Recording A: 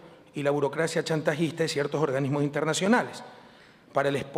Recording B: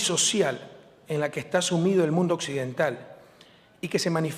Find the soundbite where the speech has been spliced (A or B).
B